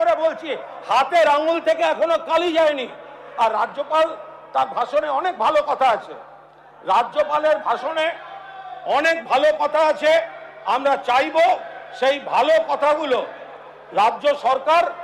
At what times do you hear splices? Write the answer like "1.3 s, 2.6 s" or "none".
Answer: none